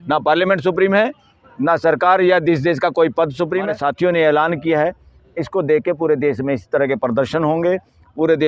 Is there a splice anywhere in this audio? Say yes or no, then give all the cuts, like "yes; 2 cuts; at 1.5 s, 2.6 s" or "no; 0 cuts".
yes; 1 cut; at 3.7 s